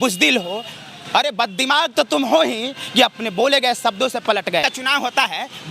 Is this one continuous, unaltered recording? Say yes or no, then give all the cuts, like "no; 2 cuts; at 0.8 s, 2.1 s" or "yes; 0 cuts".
no; 1 cut; at 4.6 s